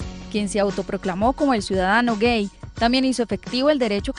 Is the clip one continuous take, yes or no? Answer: no